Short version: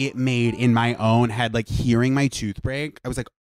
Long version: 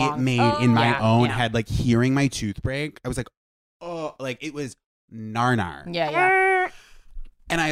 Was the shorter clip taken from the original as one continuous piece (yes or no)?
yes